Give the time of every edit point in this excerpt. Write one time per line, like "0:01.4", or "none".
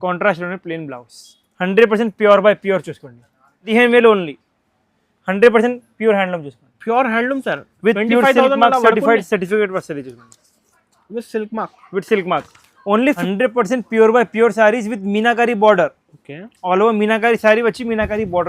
0:03.7
0:13.2